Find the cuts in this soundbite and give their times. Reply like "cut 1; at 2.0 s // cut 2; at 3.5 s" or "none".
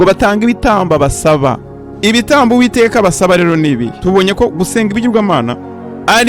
cut 1; at 3.9 s